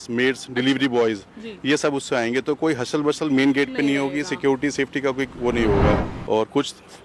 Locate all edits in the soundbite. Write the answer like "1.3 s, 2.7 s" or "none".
6.1 s

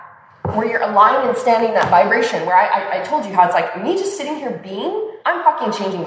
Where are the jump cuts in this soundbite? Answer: 5.1 s

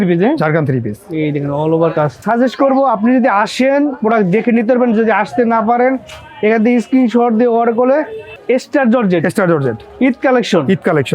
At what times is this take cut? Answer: 2.2 s, 8.3 s

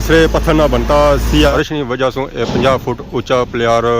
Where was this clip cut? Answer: 1.5 s

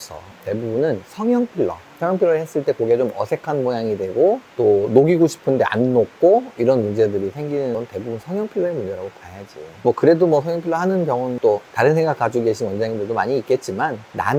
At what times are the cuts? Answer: none

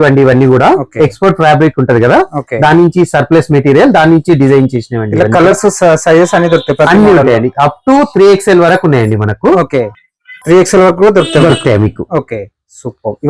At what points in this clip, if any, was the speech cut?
none

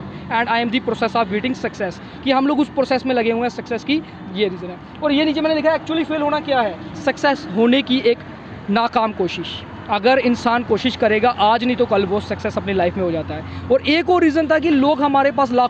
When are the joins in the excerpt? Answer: none

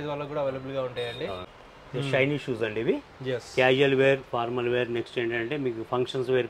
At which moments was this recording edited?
1.6 s

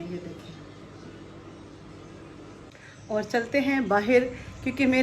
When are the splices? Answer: 2.9 s

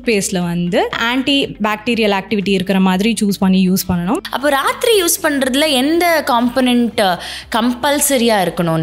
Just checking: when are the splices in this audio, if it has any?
1.0 s, 4.3 s

